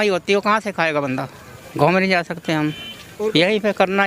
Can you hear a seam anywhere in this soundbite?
yes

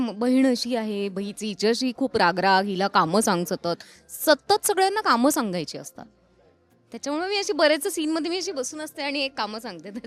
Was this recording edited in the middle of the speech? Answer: no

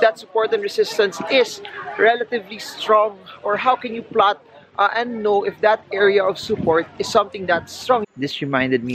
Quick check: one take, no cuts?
no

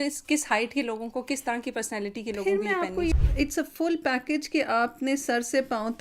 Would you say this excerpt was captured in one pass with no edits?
no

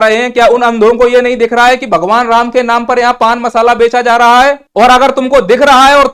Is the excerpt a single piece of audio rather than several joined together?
no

